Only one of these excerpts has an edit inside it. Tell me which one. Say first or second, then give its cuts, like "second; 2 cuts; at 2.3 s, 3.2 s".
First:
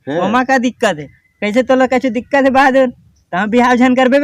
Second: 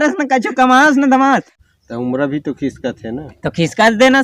second; 1 cut; at 1.5 s